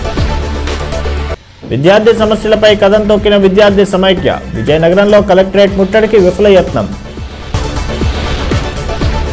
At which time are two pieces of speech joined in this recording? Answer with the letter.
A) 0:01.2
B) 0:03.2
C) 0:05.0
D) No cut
A